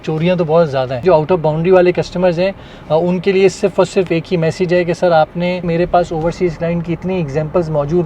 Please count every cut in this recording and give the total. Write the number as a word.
two